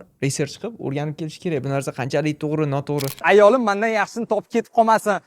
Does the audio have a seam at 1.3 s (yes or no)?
no